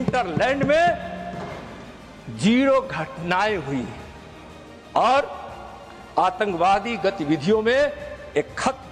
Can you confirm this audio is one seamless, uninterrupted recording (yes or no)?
yes